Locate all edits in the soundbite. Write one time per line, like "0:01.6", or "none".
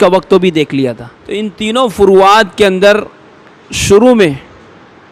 0:01.6